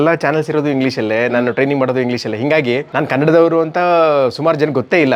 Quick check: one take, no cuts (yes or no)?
yes